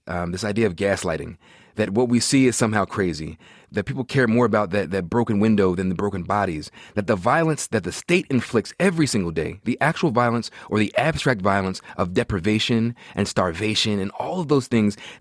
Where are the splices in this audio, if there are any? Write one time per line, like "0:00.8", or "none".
0:03.6